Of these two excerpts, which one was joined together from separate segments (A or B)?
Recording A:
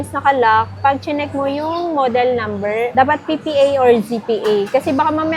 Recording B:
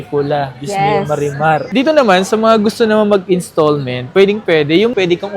B